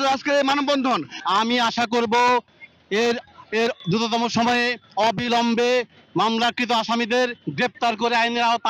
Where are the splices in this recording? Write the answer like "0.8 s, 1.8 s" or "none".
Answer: 1.2 s